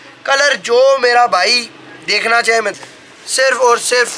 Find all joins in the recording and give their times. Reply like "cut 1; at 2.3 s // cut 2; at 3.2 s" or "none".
cut 1; at 2.8 s